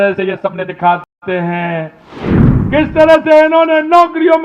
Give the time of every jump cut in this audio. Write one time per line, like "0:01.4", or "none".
0:02.3

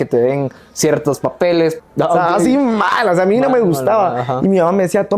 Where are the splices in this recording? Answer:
0:01.8

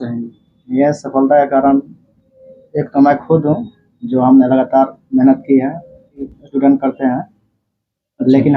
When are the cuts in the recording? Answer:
0:06.3

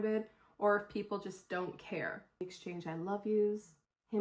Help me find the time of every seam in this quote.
0:02.6

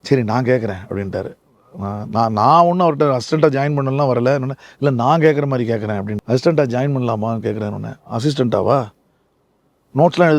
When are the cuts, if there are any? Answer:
0:06.1

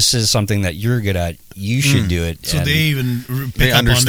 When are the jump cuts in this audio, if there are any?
none

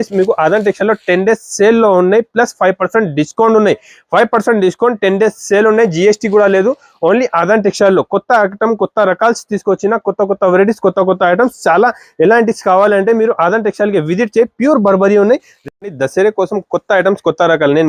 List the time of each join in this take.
0:15.5

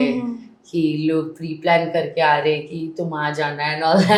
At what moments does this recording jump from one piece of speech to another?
none

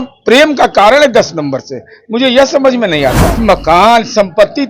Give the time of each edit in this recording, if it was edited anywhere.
0:03.3

